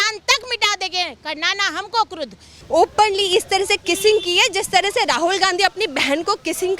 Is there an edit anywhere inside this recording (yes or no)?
yes